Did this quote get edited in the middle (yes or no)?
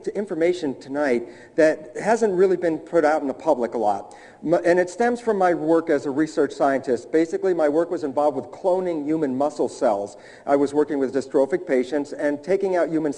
yes